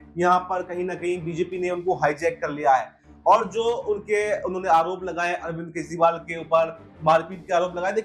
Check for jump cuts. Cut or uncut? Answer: uncut